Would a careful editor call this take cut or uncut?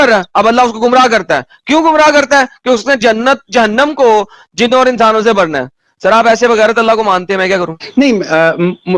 uncut